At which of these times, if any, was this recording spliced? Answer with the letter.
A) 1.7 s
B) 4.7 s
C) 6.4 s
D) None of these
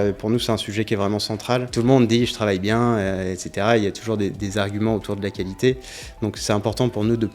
A